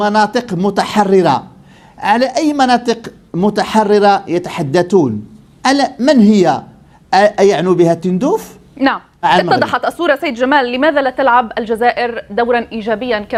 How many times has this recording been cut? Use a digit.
0